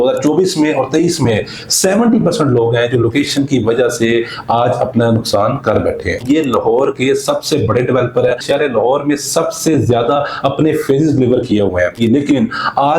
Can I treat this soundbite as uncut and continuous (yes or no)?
no